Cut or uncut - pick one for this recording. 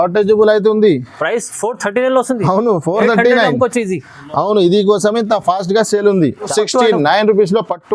cut